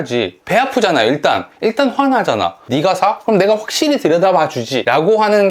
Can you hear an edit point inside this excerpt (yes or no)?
yes